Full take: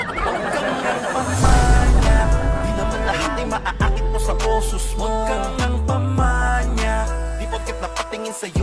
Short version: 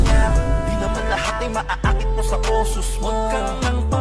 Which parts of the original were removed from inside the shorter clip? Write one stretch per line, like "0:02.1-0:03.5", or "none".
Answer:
none